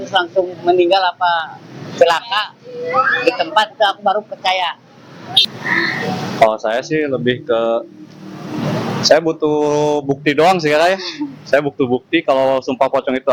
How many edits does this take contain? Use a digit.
0